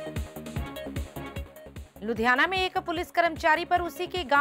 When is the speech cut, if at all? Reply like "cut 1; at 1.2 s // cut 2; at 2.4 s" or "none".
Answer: cut 1; at 1.8 s

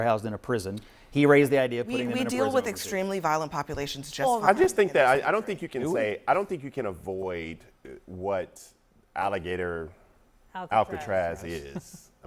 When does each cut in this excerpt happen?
cut 1; at 4.0 s

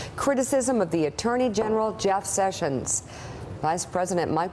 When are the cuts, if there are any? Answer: none

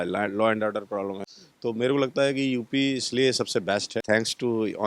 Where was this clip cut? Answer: cut 1; at 1.3 s // cut 2; at 4.0 s

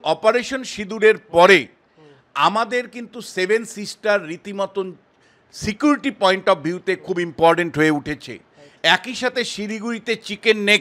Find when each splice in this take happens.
none

